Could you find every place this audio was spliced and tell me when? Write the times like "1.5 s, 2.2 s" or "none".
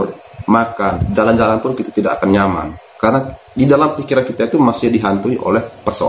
1.0 s